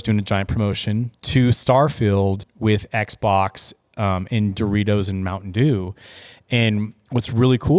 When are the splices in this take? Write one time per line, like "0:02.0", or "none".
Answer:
0:01.1
0:02.5